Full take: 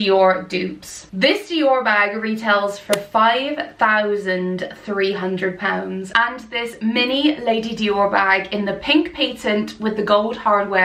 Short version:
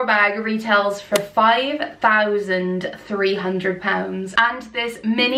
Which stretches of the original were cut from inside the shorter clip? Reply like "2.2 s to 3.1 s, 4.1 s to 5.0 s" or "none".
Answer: none

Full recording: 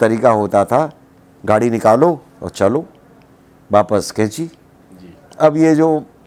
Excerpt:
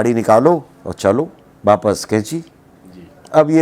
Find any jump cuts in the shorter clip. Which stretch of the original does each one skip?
3.0 s to 3.5 s

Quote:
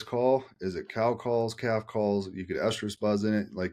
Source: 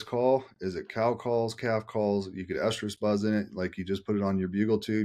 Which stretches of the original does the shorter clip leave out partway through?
none

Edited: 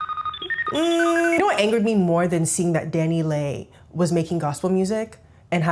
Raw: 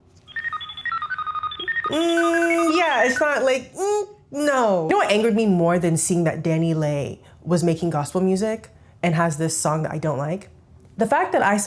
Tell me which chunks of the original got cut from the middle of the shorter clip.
2.5 s to 4.9 s

